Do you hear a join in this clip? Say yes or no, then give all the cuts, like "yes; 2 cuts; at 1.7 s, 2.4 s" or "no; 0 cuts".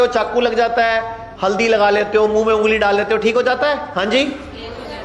yes; 2 cuts; at 1.2 s, 3.9 s